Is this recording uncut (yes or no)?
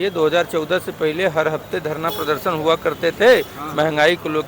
yes